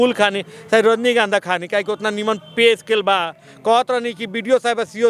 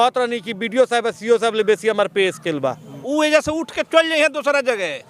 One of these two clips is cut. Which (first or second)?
second